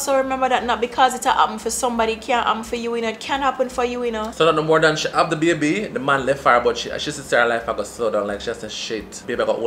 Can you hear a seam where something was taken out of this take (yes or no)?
no